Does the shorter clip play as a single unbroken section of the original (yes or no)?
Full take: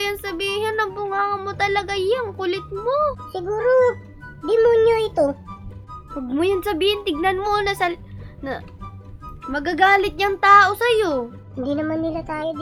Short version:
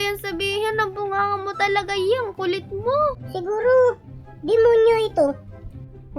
yes